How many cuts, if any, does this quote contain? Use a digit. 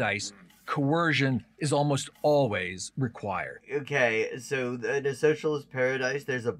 1